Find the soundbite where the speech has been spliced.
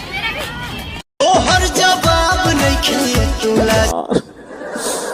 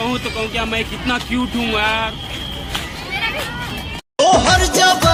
first; 1 cut; at 3.9 s

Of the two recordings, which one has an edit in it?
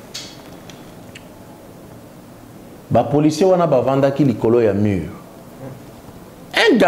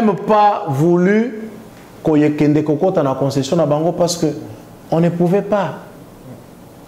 first; 1 cut; at 2.8 s

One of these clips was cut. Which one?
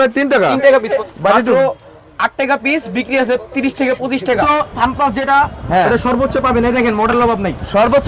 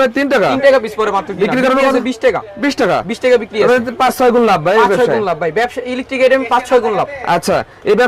first; 2 cuts; at 0.9 s, 4.4 s

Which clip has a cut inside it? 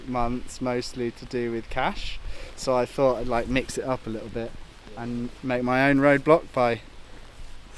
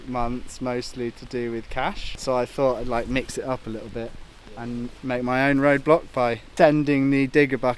second; 2 cuts; at 2.1 s, 6.4 s

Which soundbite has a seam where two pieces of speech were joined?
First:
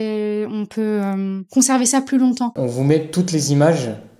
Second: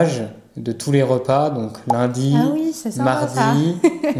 first; 2 cuts; at 1.4 s, 2.6 s

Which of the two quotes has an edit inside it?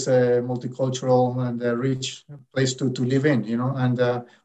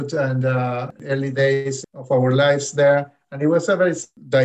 second; 2 cuts; at 1.0 s, 1.9 s

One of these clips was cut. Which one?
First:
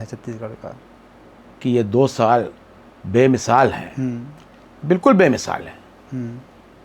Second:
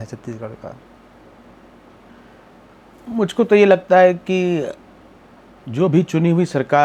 first; 1 cut; at 1.5 s

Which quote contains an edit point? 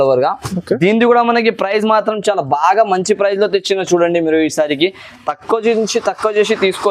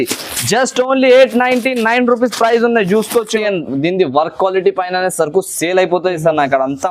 second; 1 cut; at 3.4 s

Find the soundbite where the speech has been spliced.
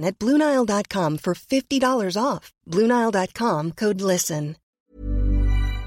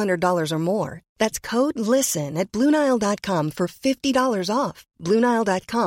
first; 1 cut; at 4.8 s

